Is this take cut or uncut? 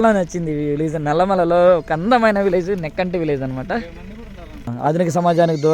cut